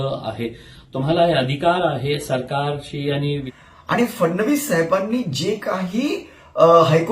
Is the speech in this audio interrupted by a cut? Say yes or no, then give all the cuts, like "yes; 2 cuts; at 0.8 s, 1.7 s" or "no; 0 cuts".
yes; 1 cut; at 3.5 s